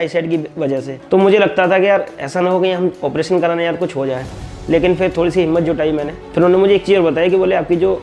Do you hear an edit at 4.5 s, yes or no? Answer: no